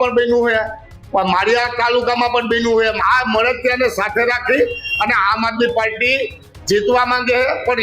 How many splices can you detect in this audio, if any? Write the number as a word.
one